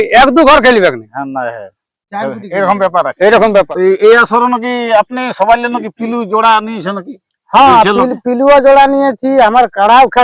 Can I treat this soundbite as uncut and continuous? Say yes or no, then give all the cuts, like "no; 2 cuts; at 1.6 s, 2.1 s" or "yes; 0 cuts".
no; 1 cut; at 3.7 s